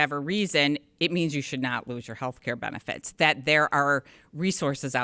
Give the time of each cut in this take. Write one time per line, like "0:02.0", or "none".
none